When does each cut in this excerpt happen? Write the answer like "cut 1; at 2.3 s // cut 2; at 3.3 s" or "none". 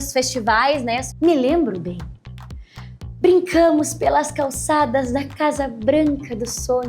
cut 1; at 1.1 s